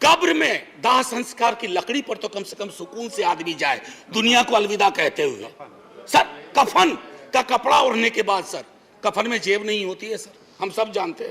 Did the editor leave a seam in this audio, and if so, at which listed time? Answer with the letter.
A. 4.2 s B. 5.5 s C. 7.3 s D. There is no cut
D